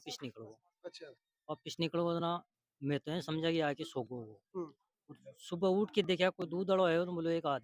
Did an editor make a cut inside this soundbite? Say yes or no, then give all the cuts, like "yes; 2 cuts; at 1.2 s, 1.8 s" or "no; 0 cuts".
no; 0 cuts